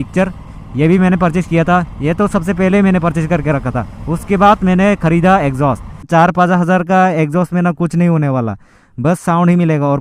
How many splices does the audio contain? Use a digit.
1